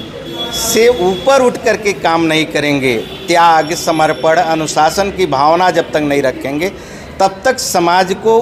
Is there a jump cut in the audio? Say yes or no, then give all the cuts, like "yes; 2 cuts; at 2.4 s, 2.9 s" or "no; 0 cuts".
no; 0 cuts